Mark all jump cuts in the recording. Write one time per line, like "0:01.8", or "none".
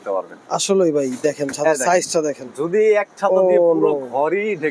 none